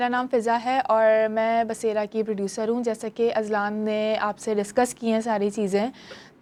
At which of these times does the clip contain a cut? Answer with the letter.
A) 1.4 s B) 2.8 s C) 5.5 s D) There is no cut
D